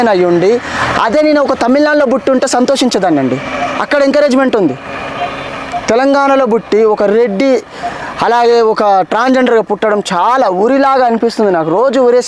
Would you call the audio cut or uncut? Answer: uncut